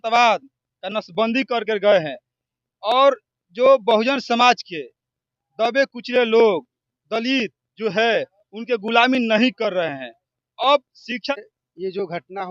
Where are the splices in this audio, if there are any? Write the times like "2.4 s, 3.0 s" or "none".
11.3 s